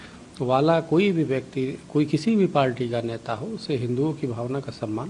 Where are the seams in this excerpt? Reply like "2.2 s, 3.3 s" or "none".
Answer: none

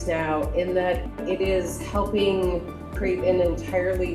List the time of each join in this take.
1.1 s, 2.9 s

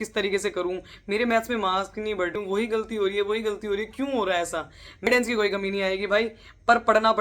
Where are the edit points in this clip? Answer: 2.3 s, 5.1 s

